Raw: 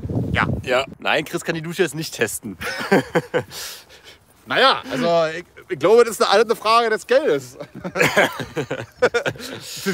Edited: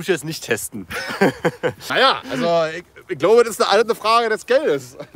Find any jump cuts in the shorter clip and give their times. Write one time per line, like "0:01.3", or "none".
0:01.8